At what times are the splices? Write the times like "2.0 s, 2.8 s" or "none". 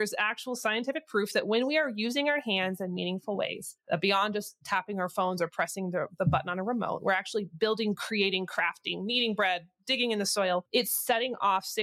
none